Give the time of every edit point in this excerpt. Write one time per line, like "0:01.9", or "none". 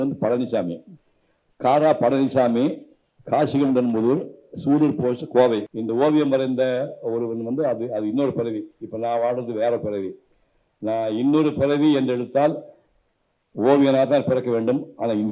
0:05.7